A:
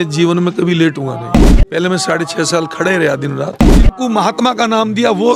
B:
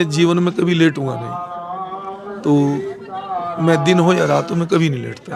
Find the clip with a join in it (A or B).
A